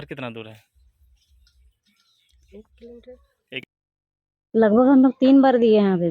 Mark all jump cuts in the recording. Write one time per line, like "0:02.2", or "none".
0:03.4